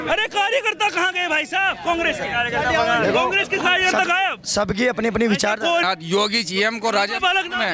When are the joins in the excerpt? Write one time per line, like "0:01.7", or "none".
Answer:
0:05.8